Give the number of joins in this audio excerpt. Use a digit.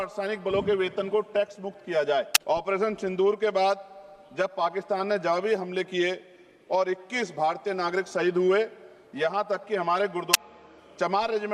2